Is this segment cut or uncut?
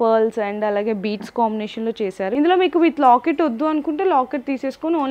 cut